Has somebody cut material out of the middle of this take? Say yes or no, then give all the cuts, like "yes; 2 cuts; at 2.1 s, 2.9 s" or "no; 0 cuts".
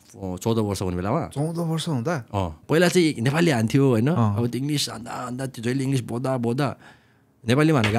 yes; 1 cut; at 2.6 s